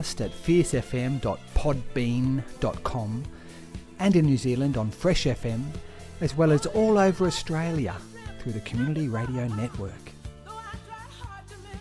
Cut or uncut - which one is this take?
cut